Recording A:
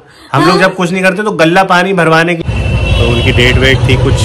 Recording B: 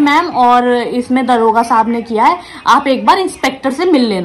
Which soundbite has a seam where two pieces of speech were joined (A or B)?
A